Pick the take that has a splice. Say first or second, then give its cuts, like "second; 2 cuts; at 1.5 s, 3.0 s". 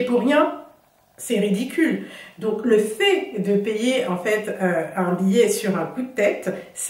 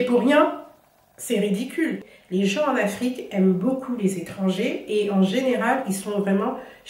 second; 1 cut; at 2.1 s